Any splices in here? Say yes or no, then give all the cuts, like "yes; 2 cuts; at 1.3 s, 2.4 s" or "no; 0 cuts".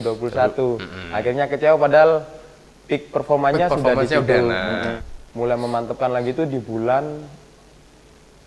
yes; 1 cut; at 5.0 s